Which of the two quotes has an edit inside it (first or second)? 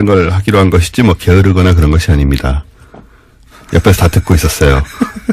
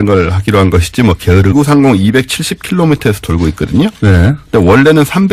first